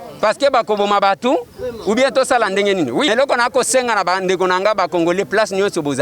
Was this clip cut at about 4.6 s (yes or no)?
no